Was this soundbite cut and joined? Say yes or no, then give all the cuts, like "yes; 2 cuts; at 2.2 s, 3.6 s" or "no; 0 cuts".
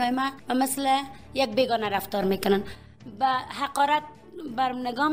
no; 0 cuts